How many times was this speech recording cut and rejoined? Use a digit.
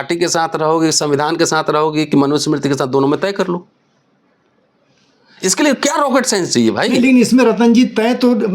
0